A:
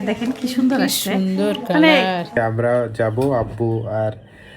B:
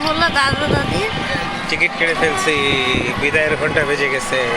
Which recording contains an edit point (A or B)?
A